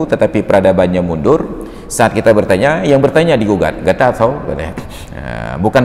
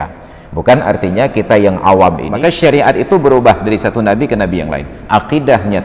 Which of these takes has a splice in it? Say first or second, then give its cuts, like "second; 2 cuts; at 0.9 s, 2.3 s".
second; 1 cut; at 2.3 s